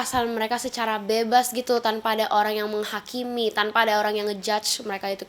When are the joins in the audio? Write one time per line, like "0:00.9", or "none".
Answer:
none